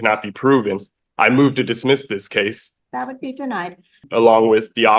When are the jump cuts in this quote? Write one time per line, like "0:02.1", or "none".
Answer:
0:02.7
0:04.0